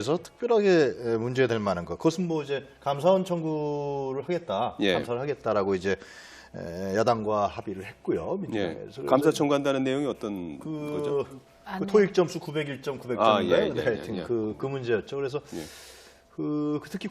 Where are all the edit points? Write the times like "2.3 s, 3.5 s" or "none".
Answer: 6.2 s